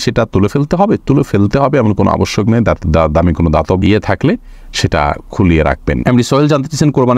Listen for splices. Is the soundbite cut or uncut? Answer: uncut